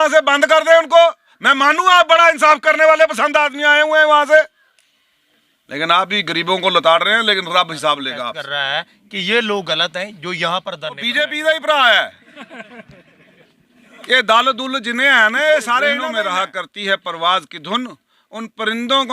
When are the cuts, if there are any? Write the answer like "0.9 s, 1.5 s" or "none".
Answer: 8.4 s, 11.1 s, 16.1 s